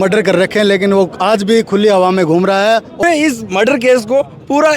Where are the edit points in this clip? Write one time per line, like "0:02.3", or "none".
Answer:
0:03.0